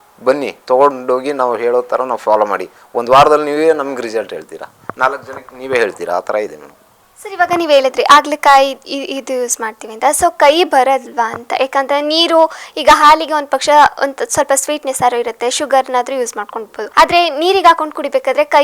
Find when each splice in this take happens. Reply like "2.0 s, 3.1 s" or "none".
none